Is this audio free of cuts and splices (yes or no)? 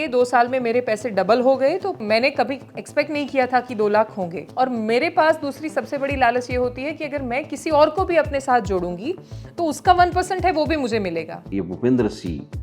no